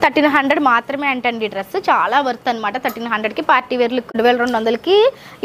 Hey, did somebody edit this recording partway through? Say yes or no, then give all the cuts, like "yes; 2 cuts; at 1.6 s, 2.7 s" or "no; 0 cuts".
yes; 1 cut; at 4.1 s